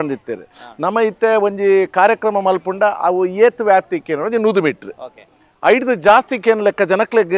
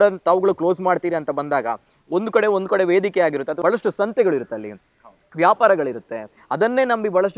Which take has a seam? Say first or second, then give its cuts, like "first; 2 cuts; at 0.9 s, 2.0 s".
second; 1 cut; at 3.5 s